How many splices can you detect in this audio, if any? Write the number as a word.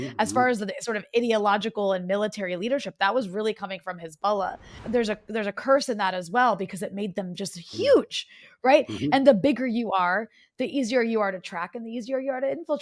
one